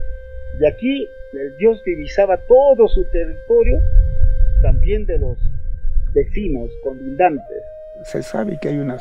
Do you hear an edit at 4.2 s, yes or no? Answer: no